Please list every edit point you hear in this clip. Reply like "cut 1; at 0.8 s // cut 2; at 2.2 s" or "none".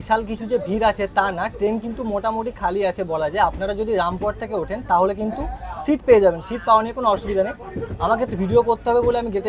none